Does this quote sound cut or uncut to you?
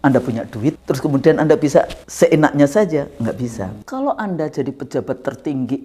cut